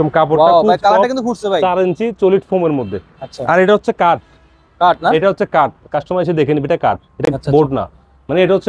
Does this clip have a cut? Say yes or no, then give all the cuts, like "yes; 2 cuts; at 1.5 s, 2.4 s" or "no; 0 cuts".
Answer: no; 0 cuts